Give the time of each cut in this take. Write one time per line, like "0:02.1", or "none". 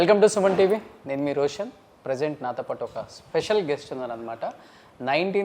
none